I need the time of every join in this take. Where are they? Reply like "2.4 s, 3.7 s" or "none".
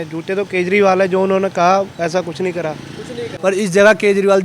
3.3 s

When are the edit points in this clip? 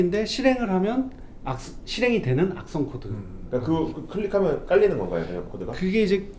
none

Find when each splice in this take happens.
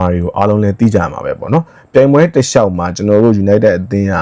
none

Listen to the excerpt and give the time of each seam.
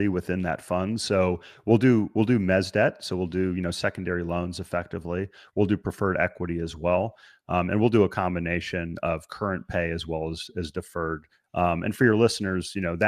none

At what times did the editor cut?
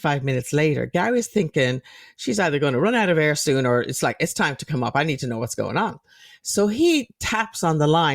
none

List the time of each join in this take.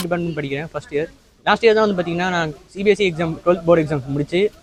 none

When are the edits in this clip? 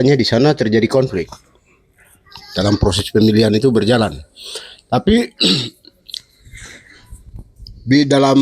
none

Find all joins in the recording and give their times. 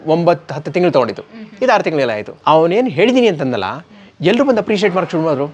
2.3 s

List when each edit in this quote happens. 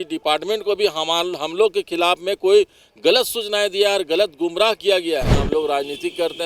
5.4 s

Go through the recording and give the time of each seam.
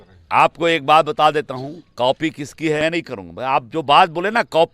2.8 s

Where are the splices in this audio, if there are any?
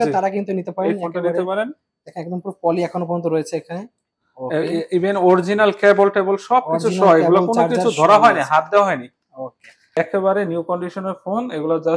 10.0 s

